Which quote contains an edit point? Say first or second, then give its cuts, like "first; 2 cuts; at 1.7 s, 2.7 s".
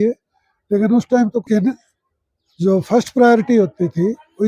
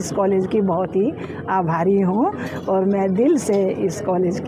first; 1 cut; at 1.4 s